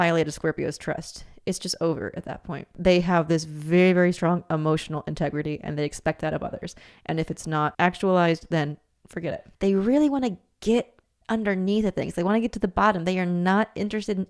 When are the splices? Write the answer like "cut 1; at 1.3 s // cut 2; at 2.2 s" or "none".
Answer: cut 1; at 2.7 s // cut 2; at 7.7 s // cut 3; at 9.4 s